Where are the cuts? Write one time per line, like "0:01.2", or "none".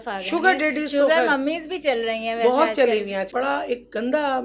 0:03.3